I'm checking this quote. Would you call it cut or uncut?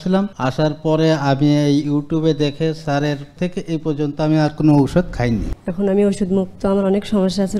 cut